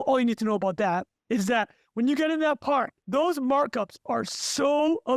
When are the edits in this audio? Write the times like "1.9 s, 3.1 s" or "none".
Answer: 1.1 s, 3.0 s